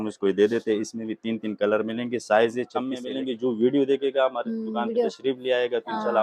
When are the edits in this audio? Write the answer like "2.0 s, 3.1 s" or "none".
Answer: 3.0 s